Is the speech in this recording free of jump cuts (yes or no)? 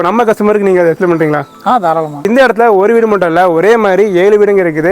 no